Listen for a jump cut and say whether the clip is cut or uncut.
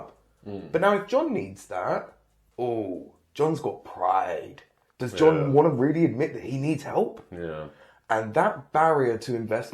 uncut